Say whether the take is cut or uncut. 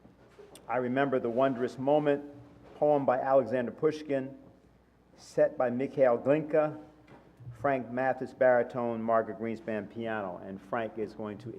cut